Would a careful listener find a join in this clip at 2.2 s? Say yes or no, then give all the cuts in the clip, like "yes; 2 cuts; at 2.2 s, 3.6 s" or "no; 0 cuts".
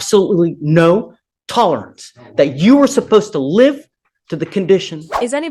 no; 0 cuts